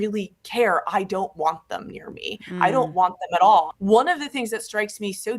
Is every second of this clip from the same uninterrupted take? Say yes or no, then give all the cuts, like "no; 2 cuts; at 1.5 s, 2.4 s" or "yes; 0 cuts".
no; 1 cut; at 3.7 s